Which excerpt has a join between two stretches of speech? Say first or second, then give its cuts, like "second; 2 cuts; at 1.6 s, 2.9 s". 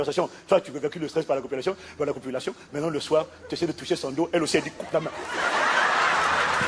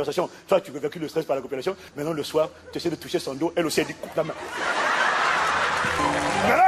second; 2 cuts; at 1.9 s, 6.0 s